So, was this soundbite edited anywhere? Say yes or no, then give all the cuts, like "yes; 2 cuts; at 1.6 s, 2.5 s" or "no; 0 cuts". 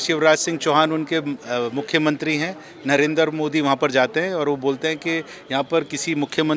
no; 0 cuts